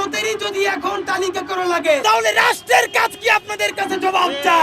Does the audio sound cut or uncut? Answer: cut